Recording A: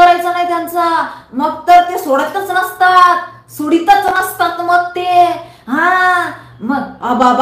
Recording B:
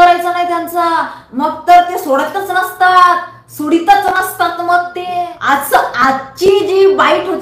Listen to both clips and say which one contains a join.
B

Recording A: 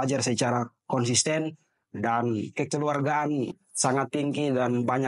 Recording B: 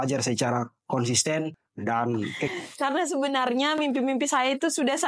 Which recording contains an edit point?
B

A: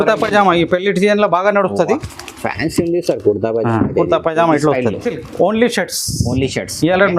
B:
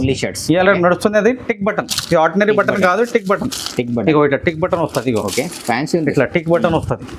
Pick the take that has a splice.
A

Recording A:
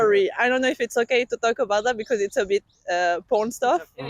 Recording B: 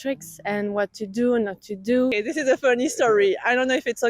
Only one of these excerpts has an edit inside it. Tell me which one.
B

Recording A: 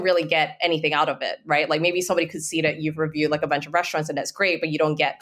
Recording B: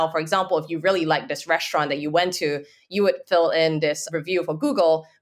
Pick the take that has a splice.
B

